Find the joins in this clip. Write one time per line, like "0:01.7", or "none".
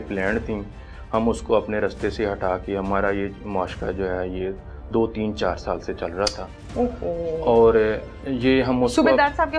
none